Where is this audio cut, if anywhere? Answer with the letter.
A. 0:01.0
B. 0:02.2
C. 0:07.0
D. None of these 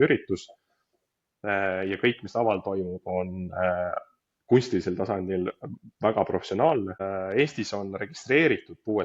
C